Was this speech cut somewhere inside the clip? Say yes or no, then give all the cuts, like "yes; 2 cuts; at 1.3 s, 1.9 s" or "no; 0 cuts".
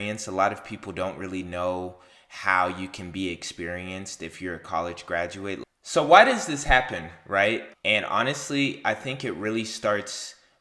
yes; 2 cuts; at 5.6 s, 7.7 s